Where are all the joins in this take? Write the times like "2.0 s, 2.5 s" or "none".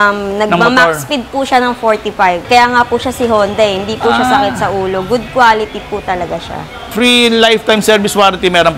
2.5 s, 6.9 s